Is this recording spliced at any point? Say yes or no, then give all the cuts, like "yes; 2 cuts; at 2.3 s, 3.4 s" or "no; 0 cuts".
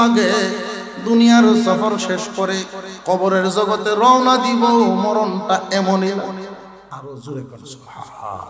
yes; 1 cut; at 6.8 s